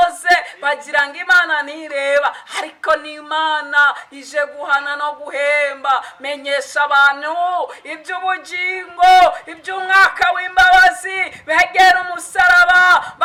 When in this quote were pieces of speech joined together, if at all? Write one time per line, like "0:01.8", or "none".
none